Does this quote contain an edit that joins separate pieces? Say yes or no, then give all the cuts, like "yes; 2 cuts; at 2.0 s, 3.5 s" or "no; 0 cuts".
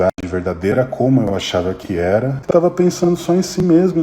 yes; 1 cut; at 2.4 s